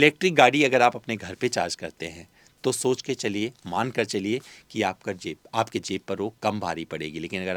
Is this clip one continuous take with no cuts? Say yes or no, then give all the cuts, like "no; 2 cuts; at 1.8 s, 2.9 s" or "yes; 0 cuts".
yes; 0 cuts